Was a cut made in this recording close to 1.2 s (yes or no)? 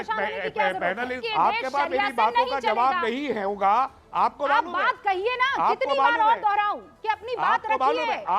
yes